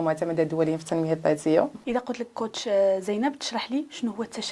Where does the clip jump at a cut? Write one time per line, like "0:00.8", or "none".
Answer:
0:01.8